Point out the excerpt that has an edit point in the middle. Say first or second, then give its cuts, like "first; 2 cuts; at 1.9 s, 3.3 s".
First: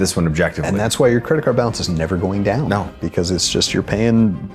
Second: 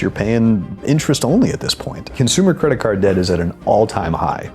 second; 1 cut; at 2.1 s